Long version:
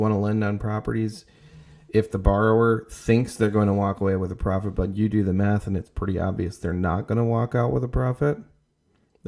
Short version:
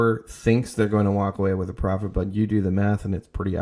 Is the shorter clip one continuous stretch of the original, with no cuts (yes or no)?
yes